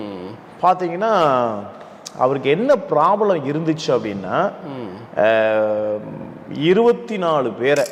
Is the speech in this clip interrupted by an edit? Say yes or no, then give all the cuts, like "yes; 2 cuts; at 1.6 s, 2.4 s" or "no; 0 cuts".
no; 0 cuts